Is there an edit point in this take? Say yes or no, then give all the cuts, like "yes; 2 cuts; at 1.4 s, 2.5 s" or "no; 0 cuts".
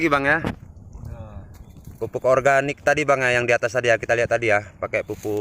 no; 0 cuts